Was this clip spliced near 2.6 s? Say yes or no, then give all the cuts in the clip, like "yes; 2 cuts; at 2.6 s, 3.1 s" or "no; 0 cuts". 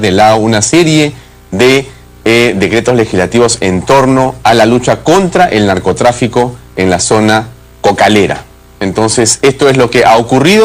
yes; 1 cut; at 2.6 s